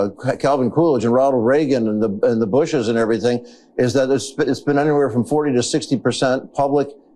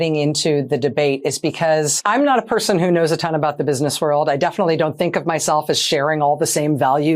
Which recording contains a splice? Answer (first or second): second